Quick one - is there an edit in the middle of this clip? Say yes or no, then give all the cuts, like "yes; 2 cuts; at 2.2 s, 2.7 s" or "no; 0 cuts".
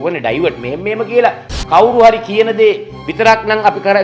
yes; 1 cut; at 1.5 s